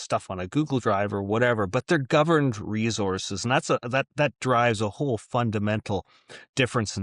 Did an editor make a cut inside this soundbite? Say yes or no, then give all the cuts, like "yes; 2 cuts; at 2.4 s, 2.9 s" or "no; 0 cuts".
no; 0 cuts